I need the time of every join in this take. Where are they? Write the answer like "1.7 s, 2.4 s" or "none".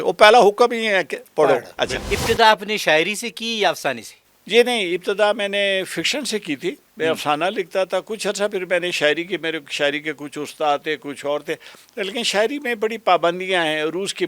2.1 s